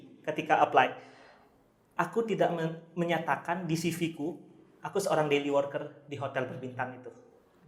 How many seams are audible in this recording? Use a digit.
0